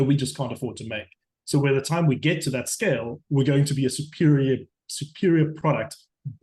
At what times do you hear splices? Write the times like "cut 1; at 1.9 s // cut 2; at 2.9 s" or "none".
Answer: none